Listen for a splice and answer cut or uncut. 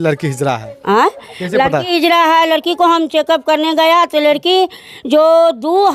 uncut